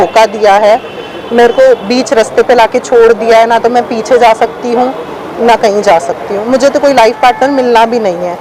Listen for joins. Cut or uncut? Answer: uncut